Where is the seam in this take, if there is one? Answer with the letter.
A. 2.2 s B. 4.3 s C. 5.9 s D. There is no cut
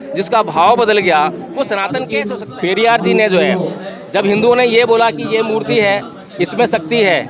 A